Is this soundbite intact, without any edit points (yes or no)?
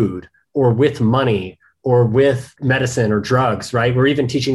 yes